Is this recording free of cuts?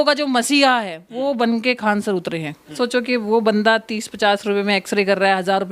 no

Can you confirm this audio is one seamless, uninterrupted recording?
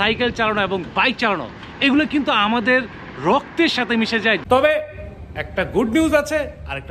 no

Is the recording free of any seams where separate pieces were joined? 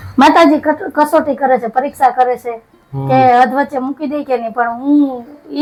yes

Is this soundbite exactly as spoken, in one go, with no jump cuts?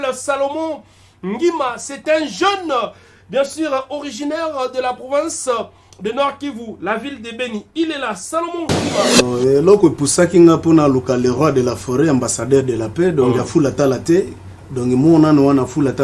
no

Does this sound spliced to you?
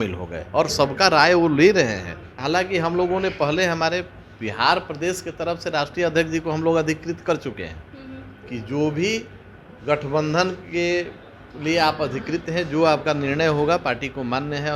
yes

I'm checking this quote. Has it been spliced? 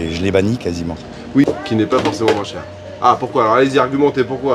yes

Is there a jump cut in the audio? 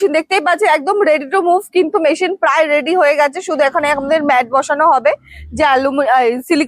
no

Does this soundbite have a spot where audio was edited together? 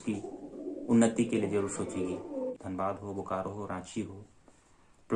yes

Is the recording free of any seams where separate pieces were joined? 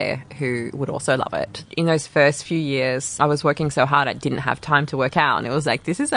no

